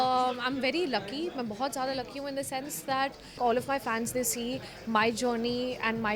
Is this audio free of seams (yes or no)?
no